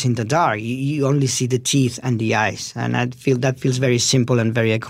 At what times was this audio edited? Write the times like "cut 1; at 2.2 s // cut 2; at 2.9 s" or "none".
none